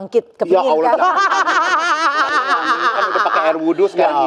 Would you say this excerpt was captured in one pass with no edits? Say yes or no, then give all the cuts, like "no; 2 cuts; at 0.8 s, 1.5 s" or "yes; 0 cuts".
yes; 0 cuts